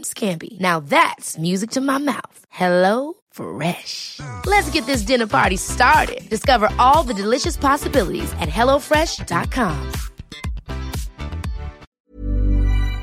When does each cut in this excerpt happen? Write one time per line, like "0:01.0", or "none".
0:11.8